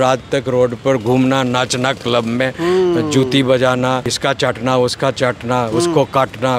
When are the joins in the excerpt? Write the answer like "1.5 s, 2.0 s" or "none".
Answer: 4.1 s